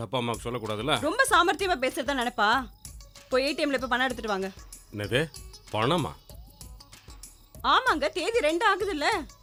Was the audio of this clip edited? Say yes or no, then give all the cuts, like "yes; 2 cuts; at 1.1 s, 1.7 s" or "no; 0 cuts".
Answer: no; 0 cuts